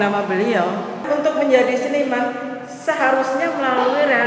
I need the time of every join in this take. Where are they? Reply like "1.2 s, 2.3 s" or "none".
1.0 s